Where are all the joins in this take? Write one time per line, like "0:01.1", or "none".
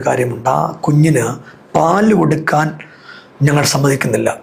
none